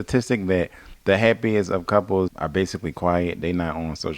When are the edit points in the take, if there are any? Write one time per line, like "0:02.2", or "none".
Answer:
0:02.3